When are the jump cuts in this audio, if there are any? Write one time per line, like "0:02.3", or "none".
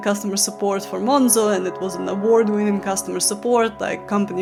none